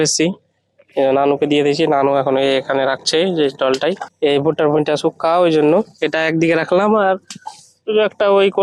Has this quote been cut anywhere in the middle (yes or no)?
no